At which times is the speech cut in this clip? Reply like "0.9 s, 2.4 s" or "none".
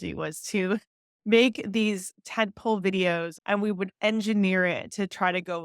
3.3 s